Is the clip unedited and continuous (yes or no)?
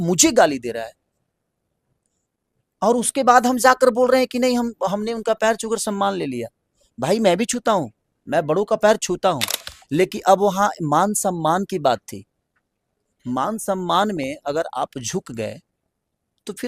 yes